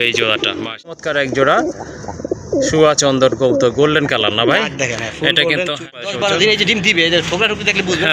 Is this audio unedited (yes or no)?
no